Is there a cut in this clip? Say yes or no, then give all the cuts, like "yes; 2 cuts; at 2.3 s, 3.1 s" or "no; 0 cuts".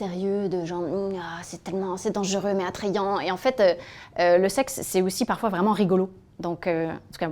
no; 0 cuts